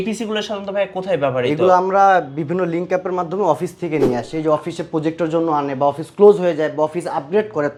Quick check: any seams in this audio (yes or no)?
no